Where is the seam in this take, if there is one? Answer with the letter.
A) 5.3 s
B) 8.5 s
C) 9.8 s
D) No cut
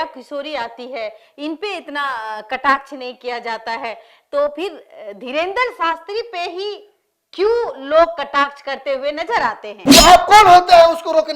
C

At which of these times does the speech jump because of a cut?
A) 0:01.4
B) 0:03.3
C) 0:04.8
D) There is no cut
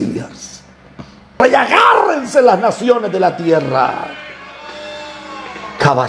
A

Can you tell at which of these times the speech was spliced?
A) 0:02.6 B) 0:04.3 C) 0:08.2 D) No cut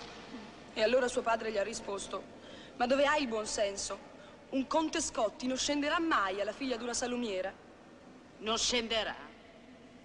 D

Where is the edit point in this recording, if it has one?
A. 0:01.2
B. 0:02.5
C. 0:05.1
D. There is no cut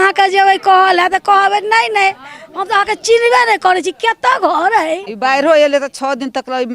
C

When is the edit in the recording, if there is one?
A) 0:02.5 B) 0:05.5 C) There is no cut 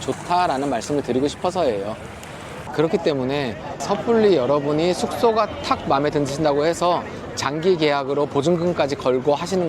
A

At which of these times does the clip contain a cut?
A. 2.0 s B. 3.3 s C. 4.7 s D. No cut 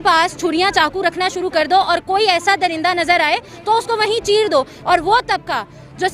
C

